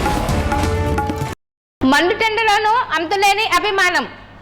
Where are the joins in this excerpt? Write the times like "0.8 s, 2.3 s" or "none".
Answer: 1.2 s